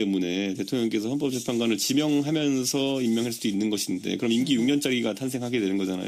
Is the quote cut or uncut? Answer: cut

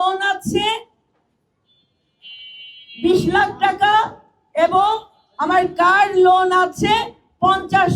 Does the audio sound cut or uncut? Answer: uncut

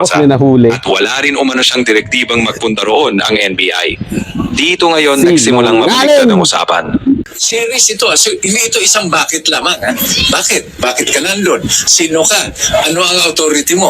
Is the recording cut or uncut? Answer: cut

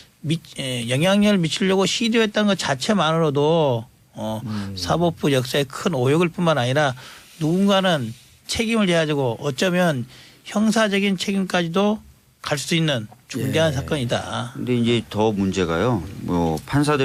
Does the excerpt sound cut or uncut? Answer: uncut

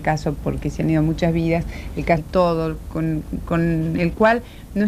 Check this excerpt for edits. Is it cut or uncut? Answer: uncut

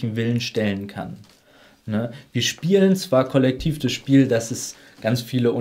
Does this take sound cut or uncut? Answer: uncut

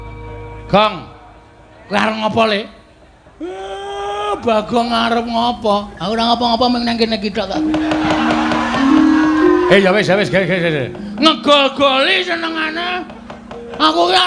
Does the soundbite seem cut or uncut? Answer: uncut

